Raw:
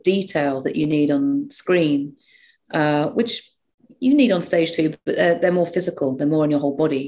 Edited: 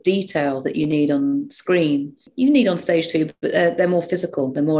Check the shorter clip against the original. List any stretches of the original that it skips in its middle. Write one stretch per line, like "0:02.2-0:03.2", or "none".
0:02.2-0:03.8